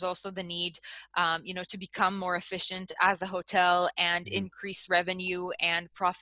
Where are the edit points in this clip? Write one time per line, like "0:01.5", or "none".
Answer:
none